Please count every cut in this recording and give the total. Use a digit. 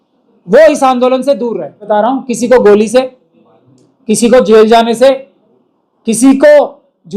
1